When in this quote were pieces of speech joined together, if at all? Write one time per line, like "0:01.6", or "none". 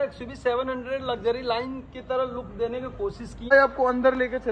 0:03.3